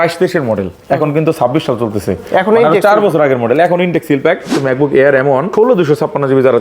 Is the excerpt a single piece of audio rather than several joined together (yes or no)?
no